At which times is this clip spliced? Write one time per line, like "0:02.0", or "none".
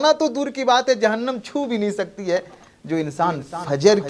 none